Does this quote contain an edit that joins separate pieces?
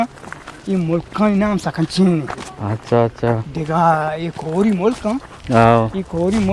no; 0 cuts

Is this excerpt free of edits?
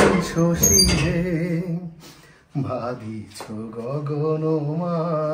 yes; 0 cuts

